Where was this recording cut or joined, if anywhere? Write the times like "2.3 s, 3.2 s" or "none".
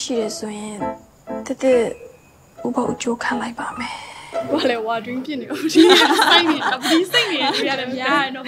4.5 s